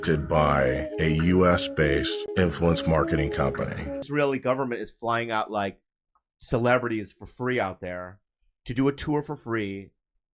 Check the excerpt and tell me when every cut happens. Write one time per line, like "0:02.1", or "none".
0:04.0